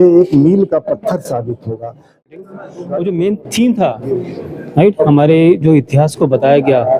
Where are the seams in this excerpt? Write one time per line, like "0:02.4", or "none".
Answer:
0:02.4